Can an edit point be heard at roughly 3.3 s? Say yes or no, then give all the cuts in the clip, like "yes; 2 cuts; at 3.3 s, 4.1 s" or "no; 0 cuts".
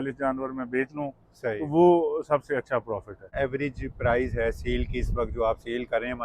yes; 1 cut; at 3.3 s